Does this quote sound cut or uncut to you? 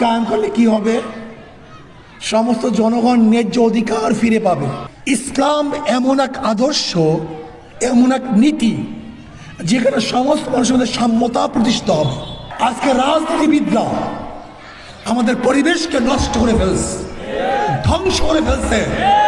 cut